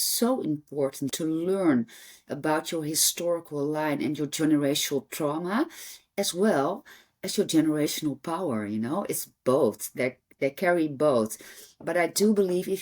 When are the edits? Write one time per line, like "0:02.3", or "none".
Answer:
0:01.1